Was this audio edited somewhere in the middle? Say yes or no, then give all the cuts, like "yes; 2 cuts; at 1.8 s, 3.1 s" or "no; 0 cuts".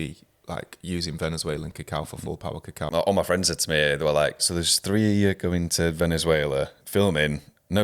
yes; 3 cuts; at 2.8 s, 4.4 s, 6.8 s